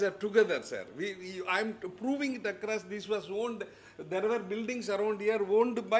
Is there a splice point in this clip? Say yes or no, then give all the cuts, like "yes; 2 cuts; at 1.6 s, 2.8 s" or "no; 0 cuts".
no; 0 cuts